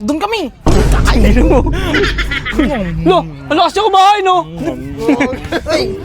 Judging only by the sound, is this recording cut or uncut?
uncut